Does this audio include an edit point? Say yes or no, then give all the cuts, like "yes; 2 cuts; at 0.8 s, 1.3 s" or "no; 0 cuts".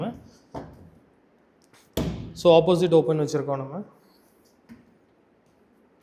no; 0 cuts